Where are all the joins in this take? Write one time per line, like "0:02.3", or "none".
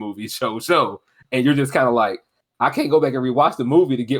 none